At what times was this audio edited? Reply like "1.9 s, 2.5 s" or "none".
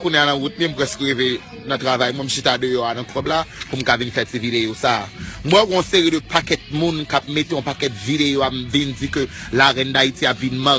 none